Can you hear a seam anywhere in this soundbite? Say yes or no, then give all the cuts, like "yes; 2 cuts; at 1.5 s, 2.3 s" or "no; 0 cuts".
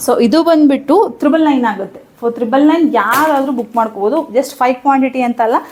no; 0 cuts